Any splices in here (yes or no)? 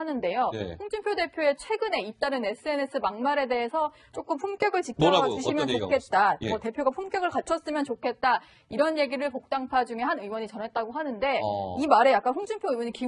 yes